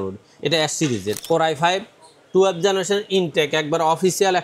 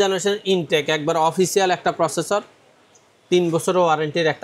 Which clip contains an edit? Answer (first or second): first